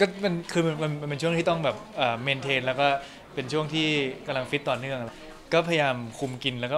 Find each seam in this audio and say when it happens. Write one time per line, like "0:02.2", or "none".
0:05.2

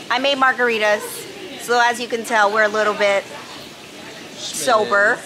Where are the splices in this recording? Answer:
none

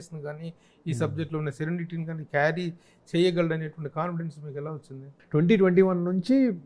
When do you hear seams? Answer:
0:05.1

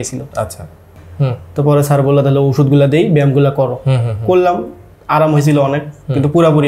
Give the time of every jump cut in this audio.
0:01.0

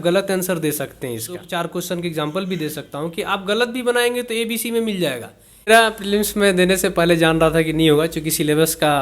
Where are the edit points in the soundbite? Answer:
0:01.4
0:05.7

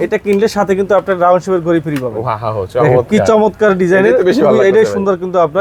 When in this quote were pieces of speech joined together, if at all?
none

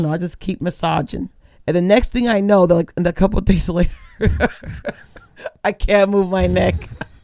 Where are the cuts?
none

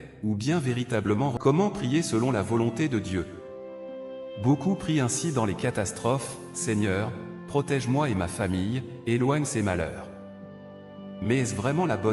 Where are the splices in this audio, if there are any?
0:01.3

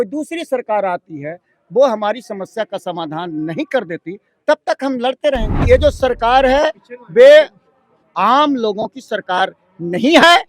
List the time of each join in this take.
0:05.6

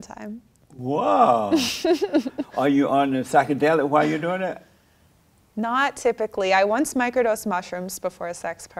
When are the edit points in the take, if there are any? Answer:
0:02.4

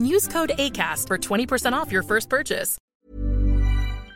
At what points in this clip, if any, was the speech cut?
0:02.7

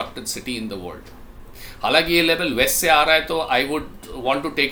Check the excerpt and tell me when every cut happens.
none

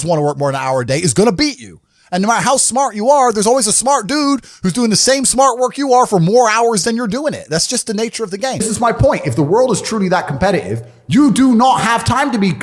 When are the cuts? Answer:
0:08.6

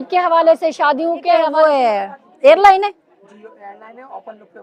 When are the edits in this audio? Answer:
0:01.5

